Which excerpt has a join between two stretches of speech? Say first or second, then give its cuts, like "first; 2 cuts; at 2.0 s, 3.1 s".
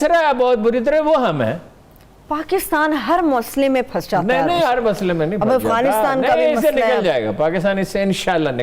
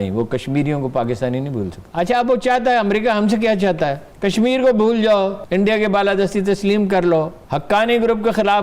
second; 4 cuts; at 1.8 s, 4.1 s, 5.4 s, 7.4 s